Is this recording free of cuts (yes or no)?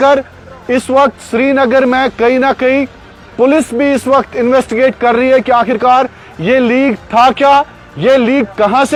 yes